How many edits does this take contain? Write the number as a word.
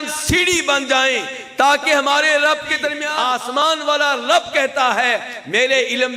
one